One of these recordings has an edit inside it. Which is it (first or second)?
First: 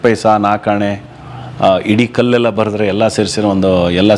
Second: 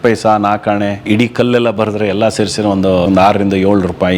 second